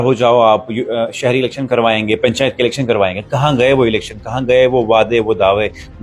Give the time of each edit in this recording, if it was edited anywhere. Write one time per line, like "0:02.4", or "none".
none